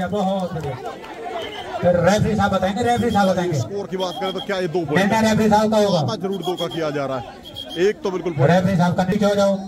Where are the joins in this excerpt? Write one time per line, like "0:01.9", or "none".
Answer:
none